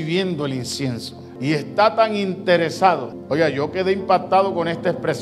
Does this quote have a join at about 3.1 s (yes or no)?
yes